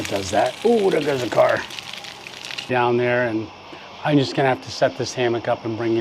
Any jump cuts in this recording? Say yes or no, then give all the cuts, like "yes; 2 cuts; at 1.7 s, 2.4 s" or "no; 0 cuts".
yes; 1 cut; at 2.7 s